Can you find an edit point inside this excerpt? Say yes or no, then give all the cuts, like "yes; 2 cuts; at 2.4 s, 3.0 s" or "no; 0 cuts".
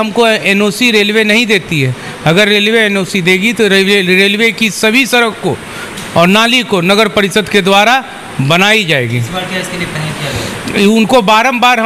no; 0 cuts